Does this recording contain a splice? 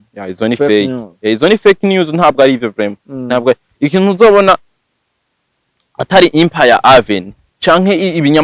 no; 0 cuts

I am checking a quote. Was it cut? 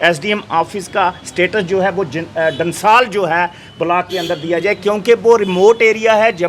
no; 0 cuts

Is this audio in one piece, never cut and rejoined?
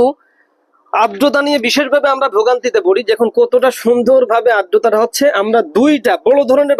yes; 0 cuts

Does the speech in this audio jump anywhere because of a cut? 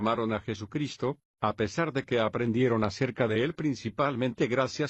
yes; 1 cut; at 1.4 s

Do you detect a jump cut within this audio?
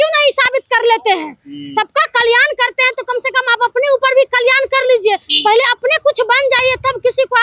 no; 0 cuts

